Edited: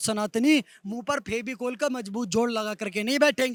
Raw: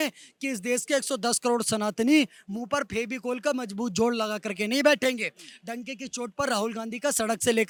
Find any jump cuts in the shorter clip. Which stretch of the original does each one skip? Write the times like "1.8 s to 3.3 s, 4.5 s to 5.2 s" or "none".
none